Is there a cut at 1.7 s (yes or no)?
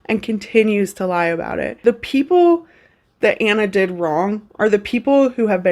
yes